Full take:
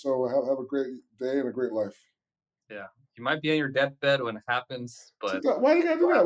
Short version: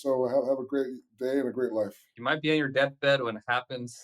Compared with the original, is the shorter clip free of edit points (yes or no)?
no